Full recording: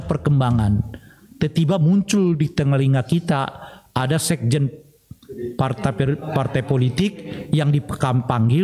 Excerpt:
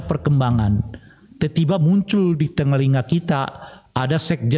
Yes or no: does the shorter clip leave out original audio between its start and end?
no